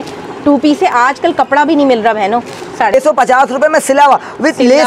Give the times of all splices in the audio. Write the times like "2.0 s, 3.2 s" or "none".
2.9 s